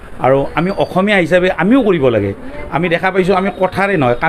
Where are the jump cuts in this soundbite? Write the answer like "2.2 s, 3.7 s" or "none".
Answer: none